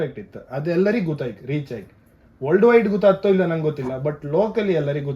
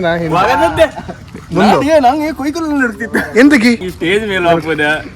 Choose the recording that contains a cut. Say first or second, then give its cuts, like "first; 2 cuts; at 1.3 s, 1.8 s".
second; 1 cut; at 3.9 s